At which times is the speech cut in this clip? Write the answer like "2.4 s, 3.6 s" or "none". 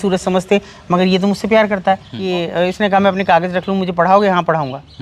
2.1 s